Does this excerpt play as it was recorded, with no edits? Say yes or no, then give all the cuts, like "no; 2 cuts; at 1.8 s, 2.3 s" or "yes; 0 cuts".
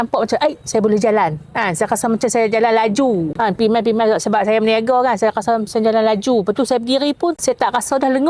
yes; 0 cuts